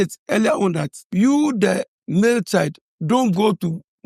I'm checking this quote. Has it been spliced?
yes; 2 cuts; at 1.0 s, 2.9 s

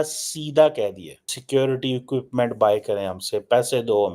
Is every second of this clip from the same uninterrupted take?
no; 1 cut; at 1.3 s

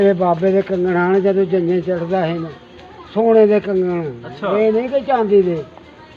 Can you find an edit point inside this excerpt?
no; 0 cuts

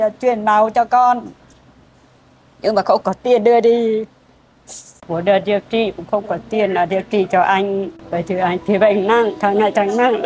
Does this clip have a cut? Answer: yes; 2 cuts; at 5.1 s, 8.0 s

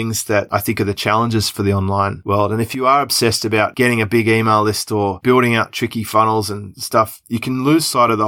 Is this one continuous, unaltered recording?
yes; 0 cuts

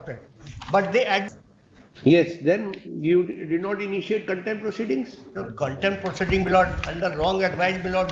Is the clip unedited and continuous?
no; 1 cut; at 1.3 s

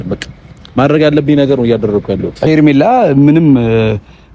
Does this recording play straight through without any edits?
no; 1 cut; at 2.5 s

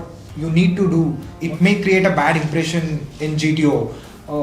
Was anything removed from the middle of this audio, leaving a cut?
yes; 1 cut; at 1.4 s

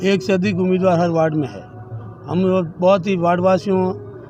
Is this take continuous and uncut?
yes; 0 cuts

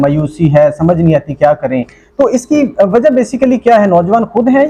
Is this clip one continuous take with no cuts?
yes; 0 cuts

